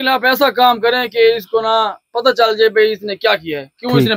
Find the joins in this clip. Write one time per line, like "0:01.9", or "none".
none